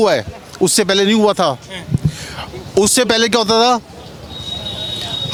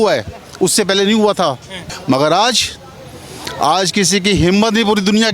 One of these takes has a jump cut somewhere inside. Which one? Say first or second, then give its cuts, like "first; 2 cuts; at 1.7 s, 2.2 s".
second; 1 cut; at 1.8 s